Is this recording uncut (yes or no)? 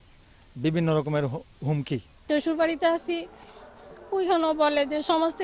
yes